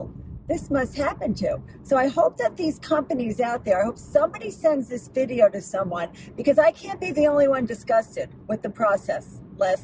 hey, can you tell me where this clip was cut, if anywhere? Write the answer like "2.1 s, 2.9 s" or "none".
none

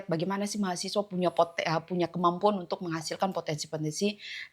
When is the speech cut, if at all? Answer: none

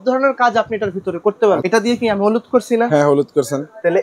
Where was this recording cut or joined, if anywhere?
1.6 s

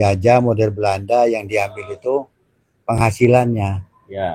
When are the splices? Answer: none

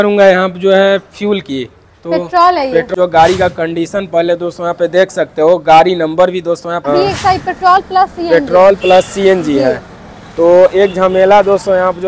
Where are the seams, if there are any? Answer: 2.9 s, 6.9 s

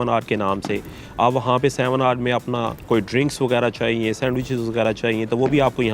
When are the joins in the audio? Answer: 2.7 s

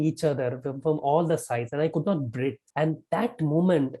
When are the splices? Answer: 2.6 s

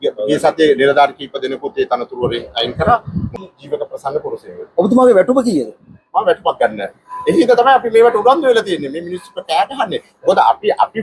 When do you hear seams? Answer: 3.3 s

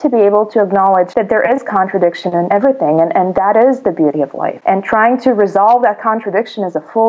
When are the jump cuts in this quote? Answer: 1.1 s, 2.5 s, 4.5 s

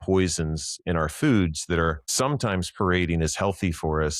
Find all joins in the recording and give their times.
2.0 s

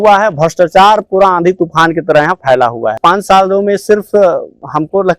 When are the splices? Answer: 3.0 s

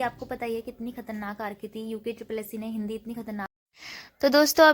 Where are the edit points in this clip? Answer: 3.5 s

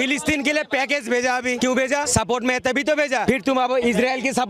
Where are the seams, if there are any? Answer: 1.8 s, 3.6 s

